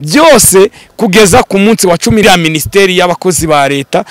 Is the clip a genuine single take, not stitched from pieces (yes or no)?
no